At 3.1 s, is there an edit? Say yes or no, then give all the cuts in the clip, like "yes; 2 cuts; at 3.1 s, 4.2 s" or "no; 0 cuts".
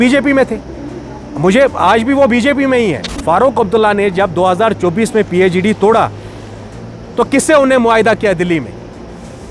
yes; 1 cut; at 3.1 s